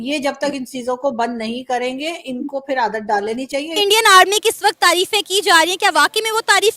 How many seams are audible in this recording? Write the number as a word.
one